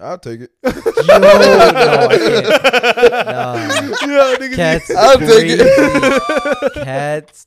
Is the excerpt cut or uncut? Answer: uncut